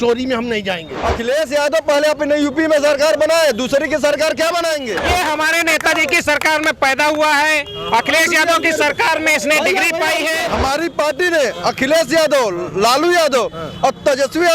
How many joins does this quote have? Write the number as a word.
three